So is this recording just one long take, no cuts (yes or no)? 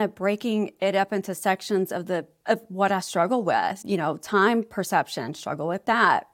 no